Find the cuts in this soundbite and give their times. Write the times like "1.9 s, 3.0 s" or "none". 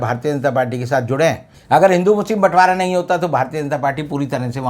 1.5 s